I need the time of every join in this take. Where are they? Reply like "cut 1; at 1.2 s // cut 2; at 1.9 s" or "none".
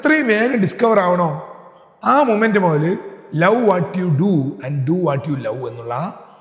none